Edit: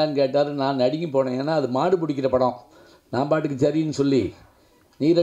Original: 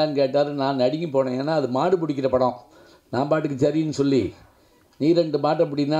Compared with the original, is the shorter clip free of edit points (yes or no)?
yes